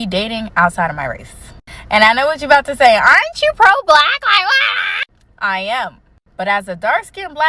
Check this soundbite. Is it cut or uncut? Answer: cut